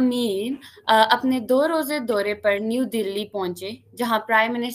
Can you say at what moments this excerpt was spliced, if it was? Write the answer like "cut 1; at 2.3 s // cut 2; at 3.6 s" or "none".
none